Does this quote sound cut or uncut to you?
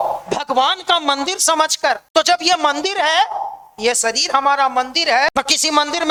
uncut